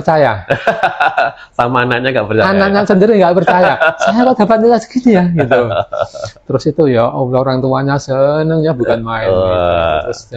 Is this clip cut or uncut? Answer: uncut